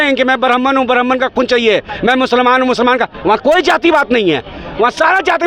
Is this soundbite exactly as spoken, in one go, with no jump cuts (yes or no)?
yes